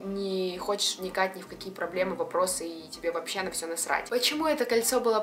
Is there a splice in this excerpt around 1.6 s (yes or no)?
no